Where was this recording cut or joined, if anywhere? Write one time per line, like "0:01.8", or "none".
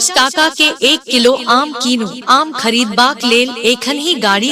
0:02.2